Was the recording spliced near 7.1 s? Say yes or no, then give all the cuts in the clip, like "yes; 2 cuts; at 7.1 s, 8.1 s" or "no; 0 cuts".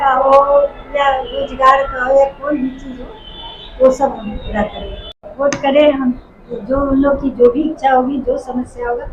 no; 1 cut; at 5.3 s